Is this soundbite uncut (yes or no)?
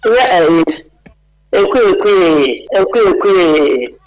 no